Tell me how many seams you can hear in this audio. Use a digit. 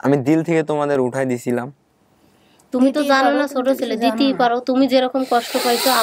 0